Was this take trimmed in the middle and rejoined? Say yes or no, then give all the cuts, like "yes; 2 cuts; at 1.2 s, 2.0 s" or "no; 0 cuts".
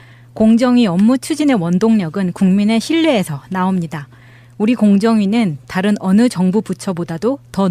no; 0 cuts